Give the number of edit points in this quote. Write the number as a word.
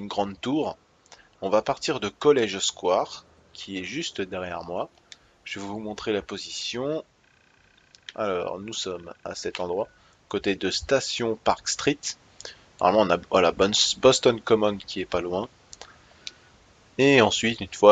one